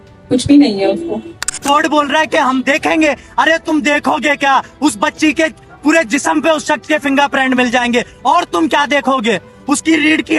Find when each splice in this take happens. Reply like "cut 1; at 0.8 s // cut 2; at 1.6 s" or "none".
cut 1; at 1.6 s